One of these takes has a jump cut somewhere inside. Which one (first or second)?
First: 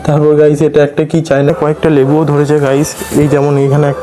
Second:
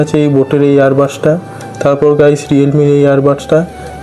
first